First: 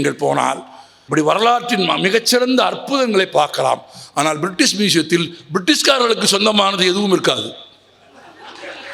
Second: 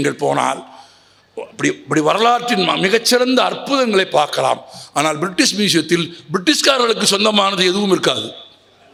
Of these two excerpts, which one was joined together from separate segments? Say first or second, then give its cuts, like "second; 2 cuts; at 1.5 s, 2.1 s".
first; 1 cut; at 1.0 s